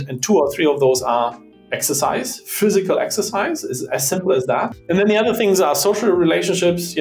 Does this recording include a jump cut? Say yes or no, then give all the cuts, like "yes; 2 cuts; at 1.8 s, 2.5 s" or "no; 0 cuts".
yes; 1 cut; at 4.8 s